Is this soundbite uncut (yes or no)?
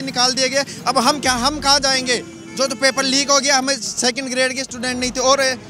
yes